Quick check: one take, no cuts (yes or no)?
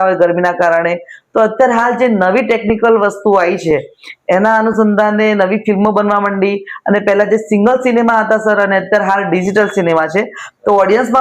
yes